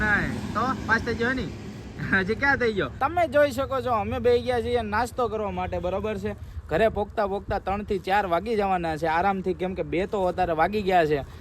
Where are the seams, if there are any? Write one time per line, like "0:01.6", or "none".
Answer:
none